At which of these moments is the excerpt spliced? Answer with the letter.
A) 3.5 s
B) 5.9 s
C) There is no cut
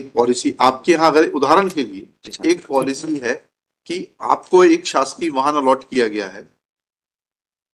C